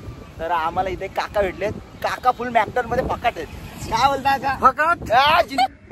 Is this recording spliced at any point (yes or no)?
no